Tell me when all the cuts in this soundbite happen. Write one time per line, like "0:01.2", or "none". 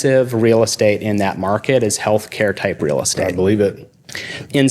none